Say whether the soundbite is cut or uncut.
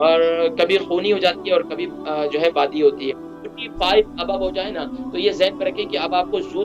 cut